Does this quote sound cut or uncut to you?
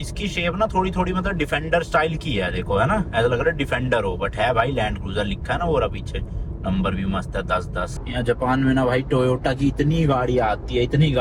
uncut